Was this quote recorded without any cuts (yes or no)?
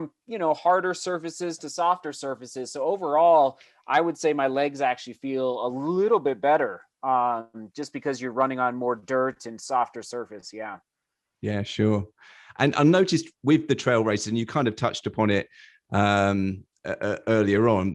yes